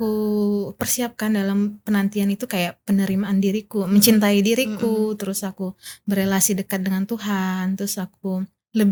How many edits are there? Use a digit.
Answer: 0